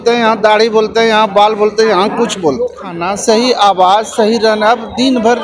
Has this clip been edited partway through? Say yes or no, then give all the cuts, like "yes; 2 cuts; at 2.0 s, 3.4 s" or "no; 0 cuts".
yes; 1 cut; at 3.1 s